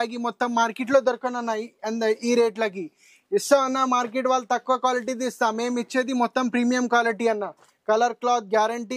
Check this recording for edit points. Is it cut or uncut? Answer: uncut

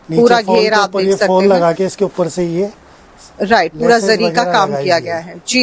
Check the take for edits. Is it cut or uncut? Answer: uncut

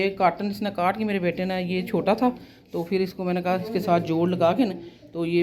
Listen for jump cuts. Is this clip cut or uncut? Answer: uncut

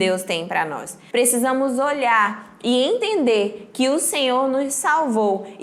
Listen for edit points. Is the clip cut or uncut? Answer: cut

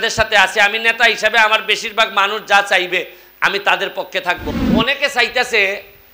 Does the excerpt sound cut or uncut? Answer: cut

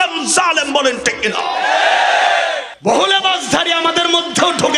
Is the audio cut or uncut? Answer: cut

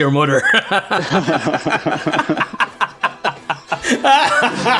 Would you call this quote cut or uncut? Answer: uncut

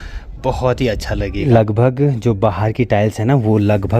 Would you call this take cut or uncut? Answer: cut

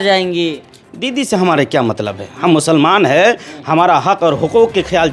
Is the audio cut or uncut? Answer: uncut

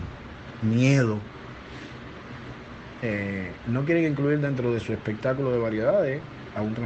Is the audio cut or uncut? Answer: uncut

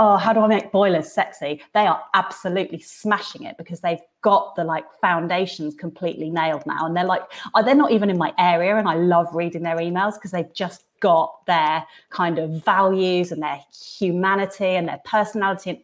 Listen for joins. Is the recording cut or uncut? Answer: uncut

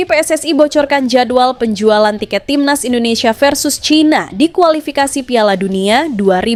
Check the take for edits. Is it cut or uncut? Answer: uncut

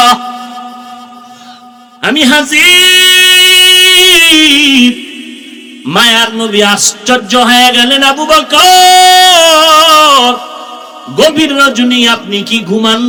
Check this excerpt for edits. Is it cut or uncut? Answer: uncut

